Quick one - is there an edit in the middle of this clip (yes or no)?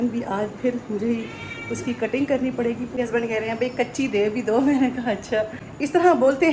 yes